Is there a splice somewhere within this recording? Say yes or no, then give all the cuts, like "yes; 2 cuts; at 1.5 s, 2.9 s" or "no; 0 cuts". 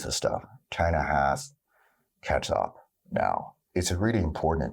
yes; 1 cut; at 3.6 s